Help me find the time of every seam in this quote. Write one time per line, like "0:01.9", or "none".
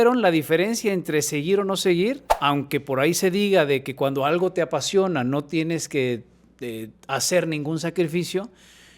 0:02.3